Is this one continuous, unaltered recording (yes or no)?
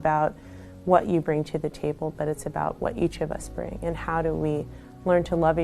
yes